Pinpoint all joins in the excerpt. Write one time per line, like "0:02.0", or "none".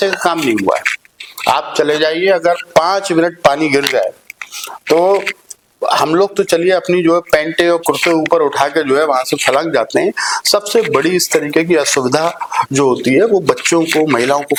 none